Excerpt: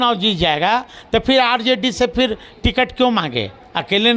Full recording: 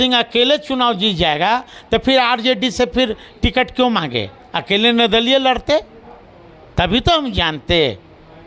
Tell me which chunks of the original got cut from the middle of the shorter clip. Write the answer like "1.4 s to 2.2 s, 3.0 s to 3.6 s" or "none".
none